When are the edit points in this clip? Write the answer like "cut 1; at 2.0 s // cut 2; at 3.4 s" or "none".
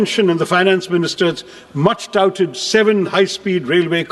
none